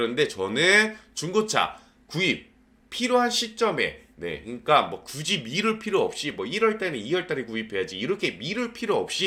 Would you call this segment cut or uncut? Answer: uncut